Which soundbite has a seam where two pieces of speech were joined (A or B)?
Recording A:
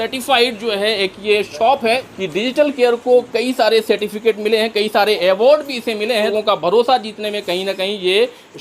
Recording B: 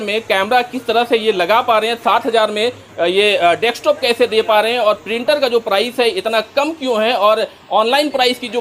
A